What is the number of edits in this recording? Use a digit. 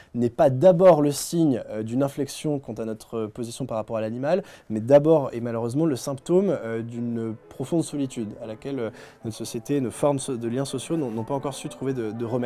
0